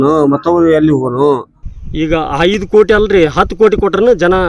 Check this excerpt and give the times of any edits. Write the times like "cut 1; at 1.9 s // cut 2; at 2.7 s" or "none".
cut 1; at 1.5 s